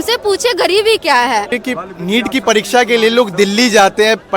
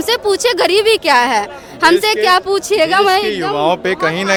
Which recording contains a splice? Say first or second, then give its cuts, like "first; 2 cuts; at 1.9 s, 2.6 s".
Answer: first; 1 cut; at 1.6 s